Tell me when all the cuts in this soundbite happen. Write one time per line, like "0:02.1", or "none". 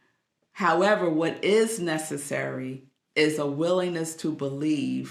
none